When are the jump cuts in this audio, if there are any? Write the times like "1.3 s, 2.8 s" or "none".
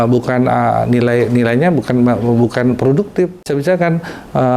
3.5 s